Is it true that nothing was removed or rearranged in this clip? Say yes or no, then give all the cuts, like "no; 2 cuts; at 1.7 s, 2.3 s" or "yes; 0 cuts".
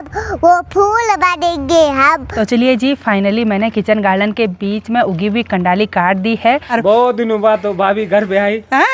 no; 2 cuts; at 2.3 s, 6.6 s